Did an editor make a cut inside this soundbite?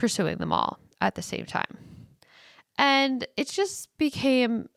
no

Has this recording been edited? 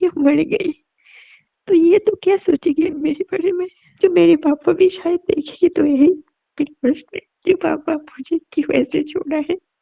yes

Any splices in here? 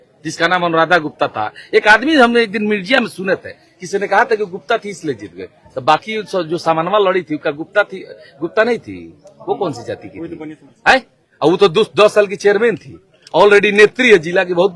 no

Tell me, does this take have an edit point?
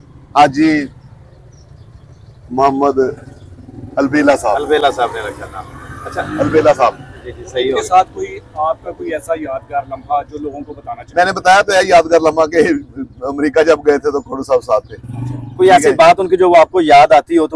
no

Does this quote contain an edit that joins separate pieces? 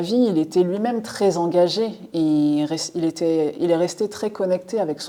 no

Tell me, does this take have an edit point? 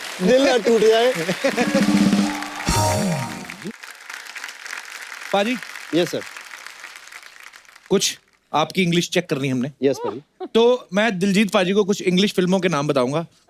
yes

